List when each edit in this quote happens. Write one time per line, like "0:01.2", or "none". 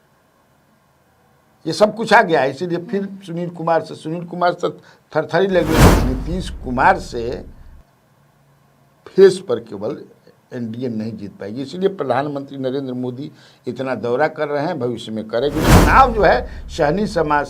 0:05.9
0:15.7